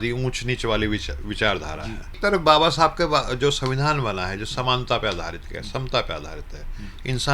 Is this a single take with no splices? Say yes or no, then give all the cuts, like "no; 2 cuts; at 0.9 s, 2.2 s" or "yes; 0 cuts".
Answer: no; 1 cut; at 2.2 s